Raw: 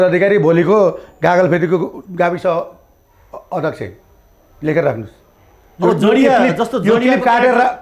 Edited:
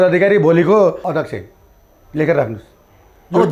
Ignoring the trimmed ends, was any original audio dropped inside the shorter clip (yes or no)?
yes